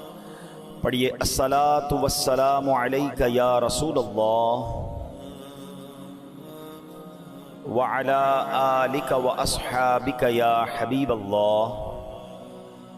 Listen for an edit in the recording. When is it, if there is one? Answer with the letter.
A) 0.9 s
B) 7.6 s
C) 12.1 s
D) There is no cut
C